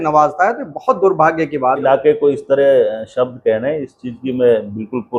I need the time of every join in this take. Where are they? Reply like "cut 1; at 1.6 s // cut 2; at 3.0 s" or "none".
cut 1; at 1.8 s